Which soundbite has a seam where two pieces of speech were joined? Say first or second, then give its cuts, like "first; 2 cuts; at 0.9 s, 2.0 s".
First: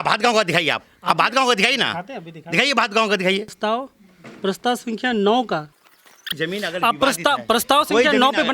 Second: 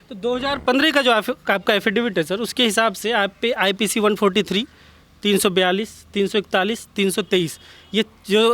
first; 2 cuts; at 3.5 s, 6.3 s